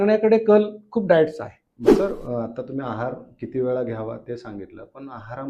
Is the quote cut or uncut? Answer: cut